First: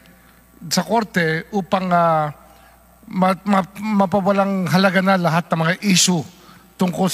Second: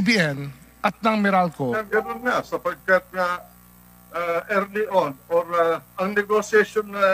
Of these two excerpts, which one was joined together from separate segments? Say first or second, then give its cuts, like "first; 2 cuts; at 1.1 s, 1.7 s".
second; 1 cut; at 1.8 s